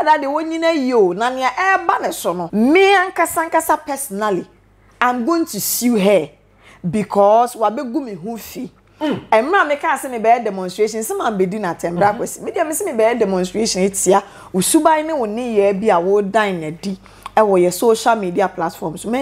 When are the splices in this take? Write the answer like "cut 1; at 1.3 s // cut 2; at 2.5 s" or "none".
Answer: cut 1; at 2.4 s

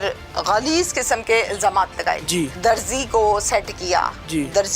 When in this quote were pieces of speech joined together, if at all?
cut 1; at 2.5 s

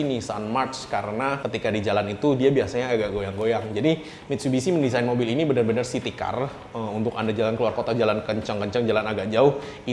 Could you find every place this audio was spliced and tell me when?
none

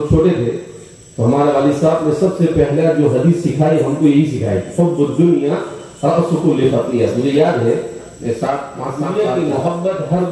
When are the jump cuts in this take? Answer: cut 1; at 9.0 s

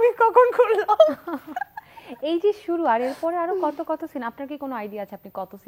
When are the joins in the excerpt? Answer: none

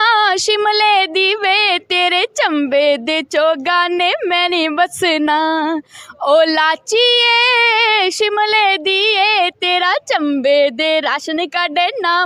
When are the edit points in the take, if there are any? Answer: none

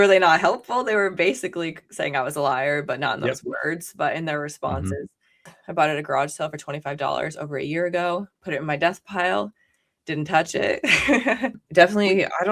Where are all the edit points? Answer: cut 1; at 5.5 s // cut 2; at 11.6 s

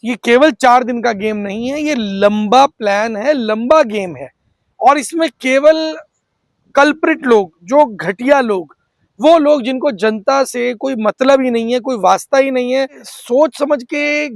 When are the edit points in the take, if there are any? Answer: cut 1; at 13.1 s

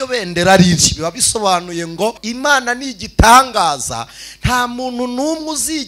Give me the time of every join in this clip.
cut 1; at 2.2 s

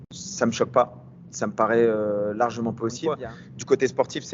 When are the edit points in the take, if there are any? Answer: cut 1; at 3.1 s

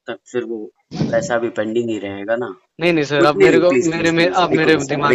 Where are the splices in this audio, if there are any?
cut 1; at 2.6 s

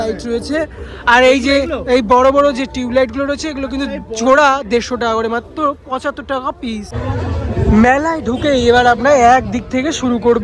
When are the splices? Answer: none

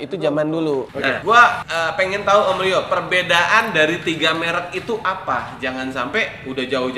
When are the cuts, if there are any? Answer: cut 1; at 1.0 s // cut 2; at 1.6 s

